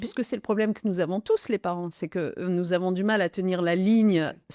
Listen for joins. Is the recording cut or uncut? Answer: uncut